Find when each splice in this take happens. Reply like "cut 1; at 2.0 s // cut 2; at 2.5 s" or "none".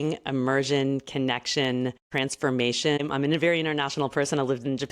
cut 1; at 2.1 s // cut 2; at 3.0 s

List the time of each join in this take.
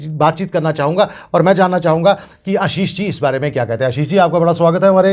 none

